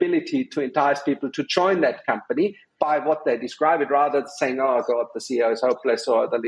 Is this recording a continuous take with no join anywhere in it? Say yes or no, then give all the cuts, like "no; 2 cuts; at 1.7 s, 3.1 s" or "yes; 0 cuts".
yes; 0 cuts